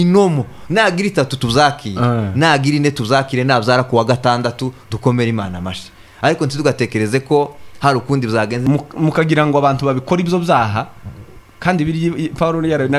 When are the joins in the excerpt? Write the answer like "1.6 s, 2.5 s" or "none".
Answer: 8.6 s